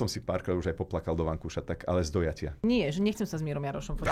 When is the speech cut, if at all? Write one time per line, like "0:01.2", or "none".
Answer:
0:02.6